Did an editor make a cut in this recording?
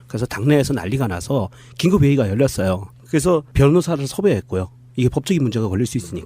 yes; 1 cut; at 5.1 s

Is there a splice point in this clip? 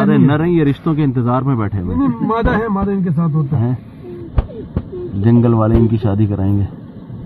no; 0 cuts

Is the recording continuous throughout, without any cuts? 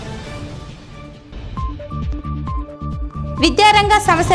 yes; 0 cuts

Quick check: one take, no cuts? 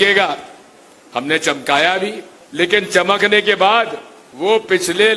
yes; 0 cuts

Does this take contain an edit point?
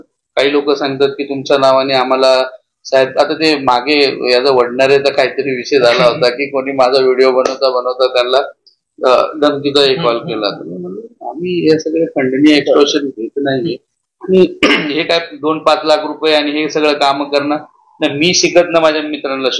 no; 0 cuts

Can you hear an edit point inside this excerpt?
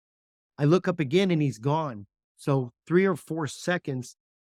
no; 0 cuts

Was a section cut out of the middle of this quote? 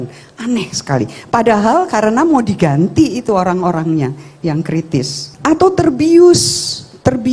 yes; 1 cut; at 5.2 s

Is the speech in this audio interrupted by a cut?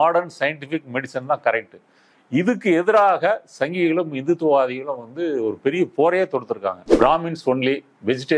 yes; 1 cut; at 6.8 s

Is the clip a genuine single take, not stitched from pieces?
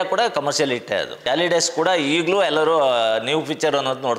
no; 1 cut; at 1.2 s

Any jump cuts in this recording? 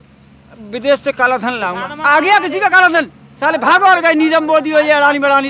no; 0 cuts

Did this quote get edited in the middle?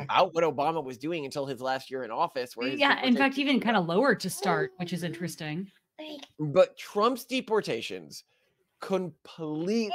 no; 0 cuts

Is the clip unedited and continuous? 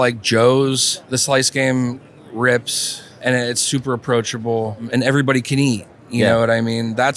no; 3 cuts; at 0.9 s, 3.1 s, 4.9 s

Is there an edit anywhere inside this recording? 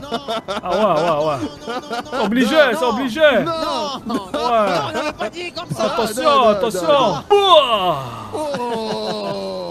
yes; 1 cut; at 7.3 s

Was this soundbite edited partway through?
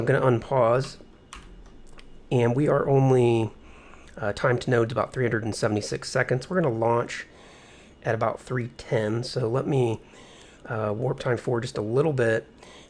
yes; 1 cut; at 3.3 s

